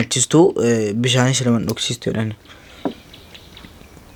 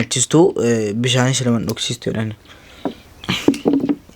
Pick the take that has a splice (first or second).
second